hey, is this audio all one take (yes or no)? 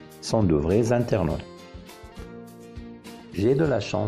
no